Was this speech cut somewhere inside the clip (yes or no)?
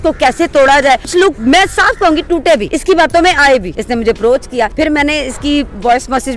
yes